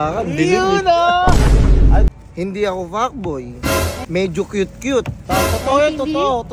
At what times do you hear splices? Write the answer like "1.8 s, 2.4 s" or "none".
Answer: 2.1 s, 4.0 s